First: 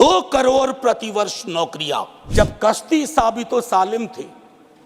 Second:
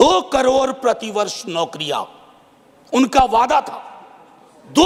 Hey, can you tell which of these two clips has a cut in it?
first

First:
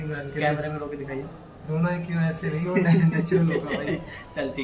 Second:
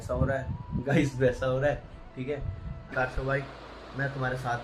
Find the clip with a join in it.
second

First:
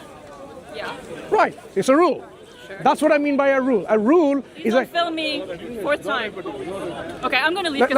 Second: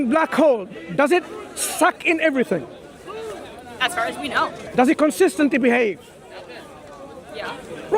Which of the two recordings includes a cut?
second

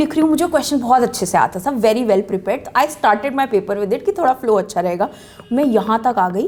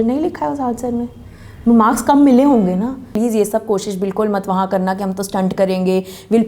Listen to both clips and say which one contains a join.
second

